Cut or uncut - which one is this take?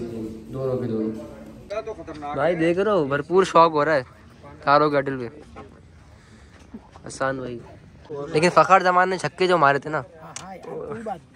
cut